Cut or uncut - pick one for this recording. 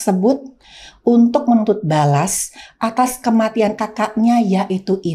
cut